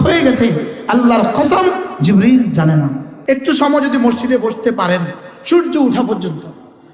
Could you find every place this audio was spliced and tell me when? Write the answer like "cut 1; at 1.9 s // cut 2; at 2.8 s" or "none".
cut 1; at 3.1 s